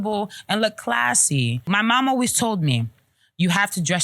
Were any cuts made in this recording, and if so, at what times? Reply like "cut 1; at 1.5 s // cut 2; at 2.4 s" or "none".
cut 1; at 1.6 s